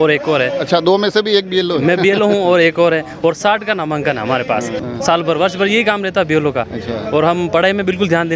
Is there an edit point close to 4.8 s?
yes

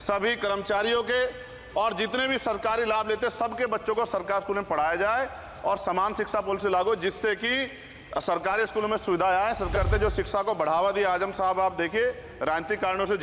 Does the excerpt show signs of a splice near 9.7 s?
yes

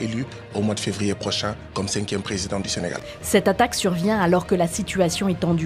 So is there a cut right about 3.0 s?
yes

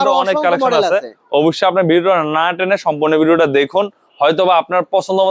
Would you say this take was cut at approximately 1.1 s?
no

